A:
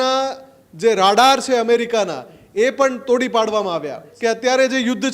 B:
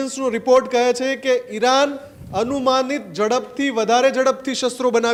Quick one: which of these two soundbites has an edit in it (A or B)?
A